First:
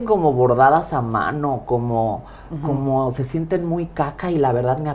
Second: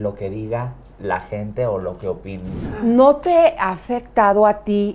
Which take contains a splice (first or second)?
second